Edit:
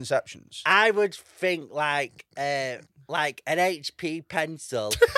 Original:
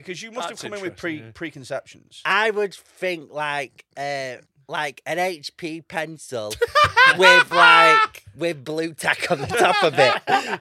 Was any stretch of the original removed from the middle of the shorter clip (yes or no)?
no